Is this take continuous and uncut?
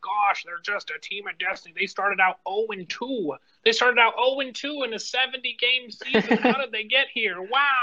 yes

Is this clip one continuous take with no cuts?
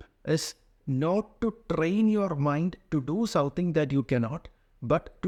yes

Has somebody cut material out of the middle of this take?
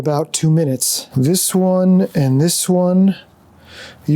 yes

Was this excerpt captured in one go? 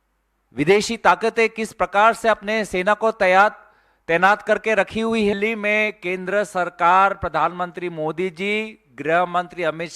no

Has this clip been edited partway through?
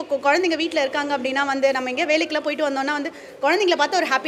no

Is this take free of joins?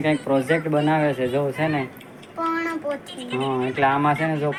yes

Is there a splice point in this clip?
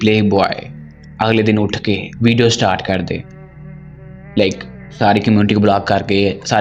no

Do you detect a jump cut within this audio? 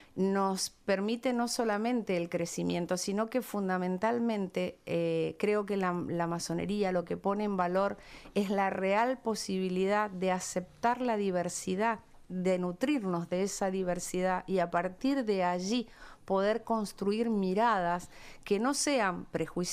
no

